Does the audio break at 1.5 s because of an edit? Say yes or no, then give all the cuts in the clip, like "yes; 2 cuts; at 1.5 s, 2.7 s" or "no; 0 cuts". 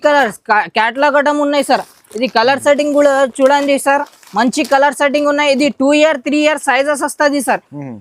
no; 0 cuts